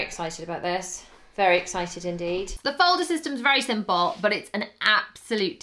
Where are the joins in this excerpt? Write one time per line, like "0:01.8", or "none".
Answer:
0:02.5